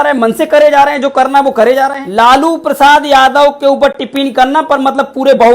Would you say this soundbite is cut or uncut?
cut